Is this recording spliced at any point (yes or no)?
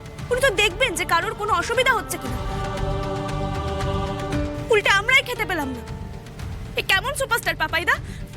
no